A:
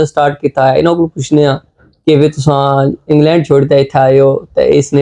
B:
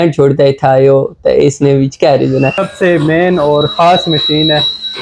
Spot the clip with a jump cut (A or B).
B